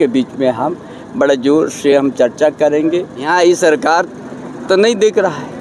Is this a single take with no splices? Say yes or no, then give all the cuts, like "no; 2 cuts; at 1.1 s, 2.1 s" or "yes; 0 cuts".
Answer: no; 1 cut; at 3.3 s